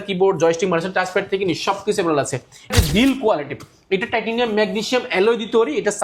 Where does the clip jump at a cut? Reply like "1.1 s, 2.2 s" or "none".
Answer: 2.7 s